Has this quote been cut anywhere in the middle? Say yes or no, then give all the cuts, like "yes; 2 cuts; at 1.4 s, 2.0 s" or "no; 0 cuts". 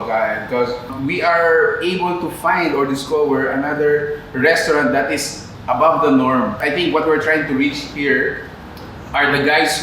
yes; 2 cuts; at 1.0 s, 6.6 s